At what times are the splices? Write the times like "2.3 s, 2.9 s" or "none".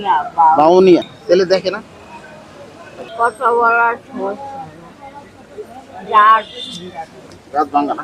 1.1 s, 3.1 s

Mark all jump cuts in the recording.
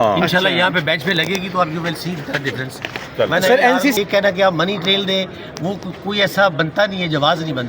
4.0 s

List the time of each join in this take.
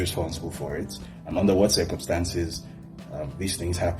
none

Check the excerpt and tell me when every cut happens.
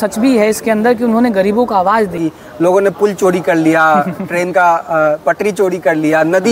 2.2 s

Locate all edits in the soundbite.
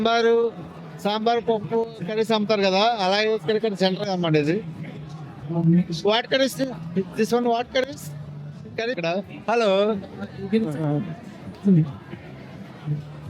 9.0 s

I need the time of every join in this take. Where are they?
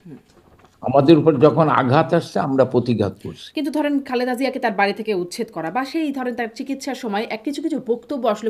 none

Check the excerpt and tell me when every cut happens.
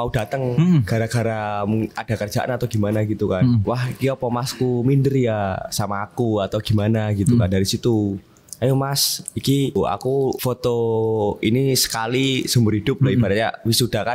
3.6 s, 10.1 s

